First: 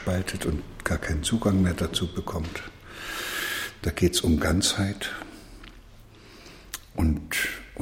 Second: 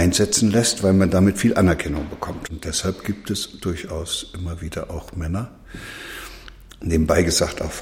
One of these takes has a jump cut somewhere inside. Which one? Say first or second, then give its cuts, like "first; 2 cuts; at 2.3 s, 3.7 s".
second; 1 cut; at 2.5 s